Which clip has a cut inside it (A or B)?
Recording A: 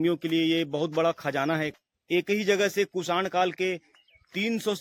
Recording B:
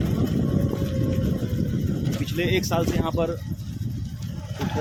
A